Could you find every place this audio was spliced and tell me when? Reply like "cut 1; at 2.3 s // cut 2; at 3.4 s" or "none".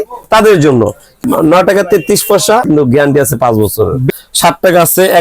cut 1; at 1.2 s // cut 2; at 2.7 s // cut 3; at 4.1 s